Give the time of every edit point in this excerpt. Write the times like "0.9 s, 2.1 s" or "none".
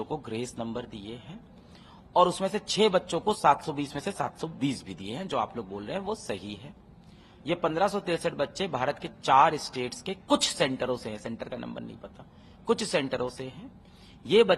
none